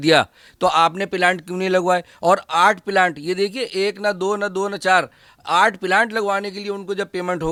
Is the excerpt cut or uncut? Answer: uncut